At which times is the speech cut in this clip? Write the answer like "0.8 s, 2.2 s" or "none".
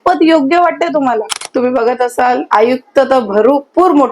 1.4 s